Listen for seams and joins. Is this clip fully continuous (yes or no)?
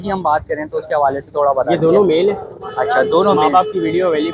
yes